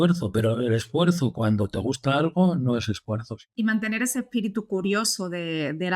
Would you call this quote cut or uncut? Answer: cut